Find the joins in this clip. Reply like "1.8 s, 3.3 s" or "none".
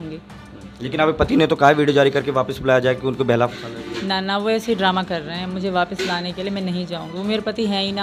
none

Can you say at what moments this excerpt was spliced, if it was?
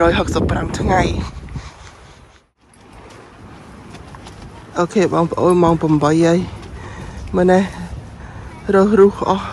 none

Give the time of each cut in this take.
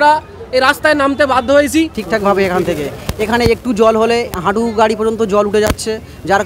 2.0 s

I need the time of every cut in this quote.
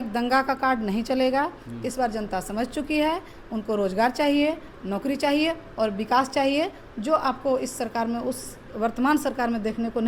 none

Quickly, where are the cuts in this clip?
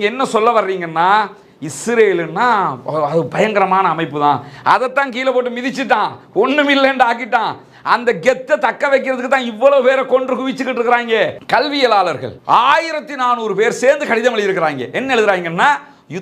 11.4 s

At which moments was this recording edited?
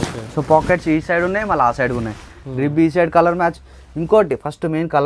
none

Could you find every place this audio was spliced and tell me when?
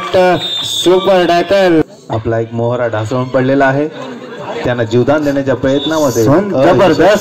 1.8 s

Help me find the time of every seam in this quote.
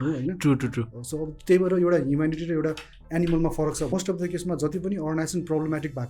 3.9 s

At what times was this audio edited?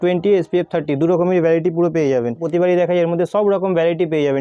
none

